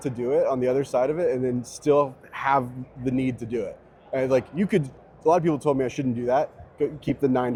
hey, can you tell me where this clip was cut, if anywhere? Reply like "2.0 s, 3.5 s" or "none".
none